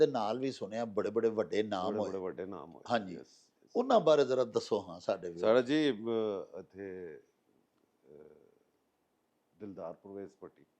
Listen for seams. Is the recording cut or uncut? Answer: uncut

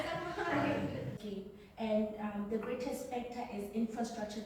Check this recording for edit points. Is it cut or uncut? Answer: cut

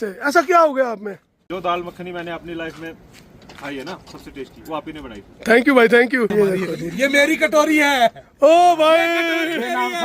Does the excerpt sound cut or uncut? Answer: cut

